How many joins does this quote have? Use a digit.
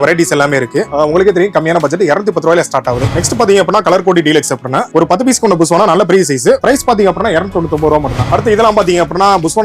1